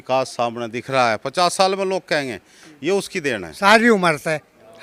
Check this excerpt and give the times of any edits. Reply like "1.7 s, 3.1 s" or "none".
3.5 s